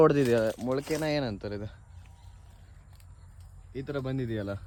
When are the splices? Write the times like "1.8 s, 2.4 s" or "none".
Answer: none